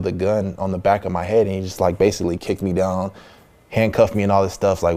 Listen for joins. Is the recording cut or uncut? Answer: uncut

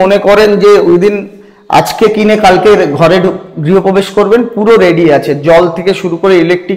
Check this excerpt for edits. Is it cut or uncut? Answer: uncut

